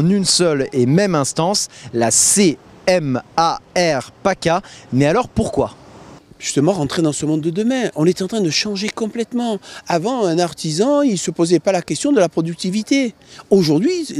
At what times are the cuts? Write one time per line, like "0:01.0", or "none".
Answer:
0:01.9